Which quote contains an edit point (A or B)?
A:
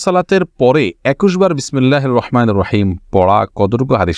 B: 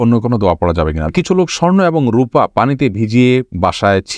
B